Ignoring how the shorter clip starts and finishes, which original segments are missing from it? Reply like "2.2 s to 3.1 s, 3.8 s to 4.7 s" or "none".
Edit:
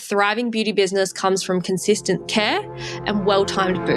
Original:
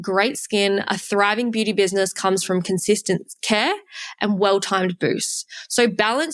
3.2 s to 3.4 s